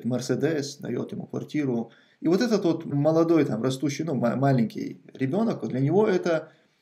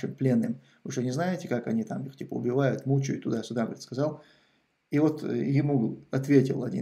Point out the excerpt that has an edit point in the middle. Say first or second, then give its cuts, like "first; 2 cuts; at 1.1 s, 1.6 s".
first; 1 cut; at 2.9 s